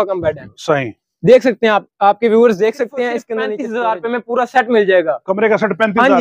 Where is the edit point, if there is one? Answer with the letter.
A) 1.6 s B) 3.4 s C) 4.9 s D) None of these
B